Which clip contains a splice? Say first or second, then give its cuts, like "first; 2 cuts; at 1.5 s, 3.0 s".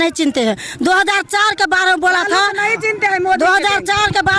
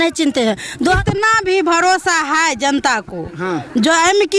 second; 1 cut; at 1.0 s